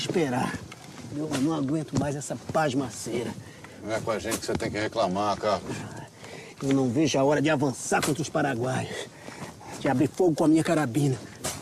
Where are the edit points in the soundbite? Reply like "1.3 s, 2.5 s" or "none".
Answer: 3.2 s